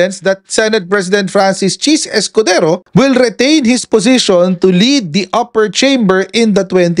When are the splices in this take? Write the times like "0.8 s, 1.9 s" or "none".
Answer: none